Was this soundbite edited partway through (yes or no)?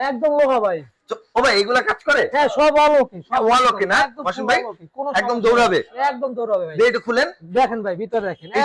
no